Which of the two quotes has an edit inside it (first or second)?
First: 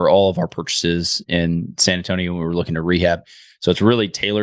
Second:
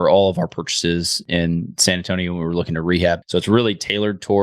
second